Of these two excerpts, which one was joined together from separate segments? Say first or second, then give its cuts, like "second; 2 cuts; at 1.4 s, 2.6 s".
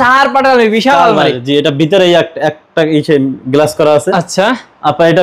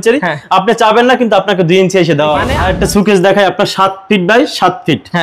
second; 1 cut; at 2.5 s